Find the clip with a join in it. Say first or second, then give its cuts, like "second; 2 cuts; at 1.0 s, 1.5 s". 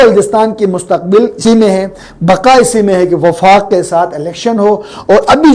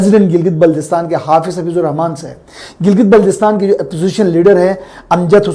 first; 1 cut; at 1.4 s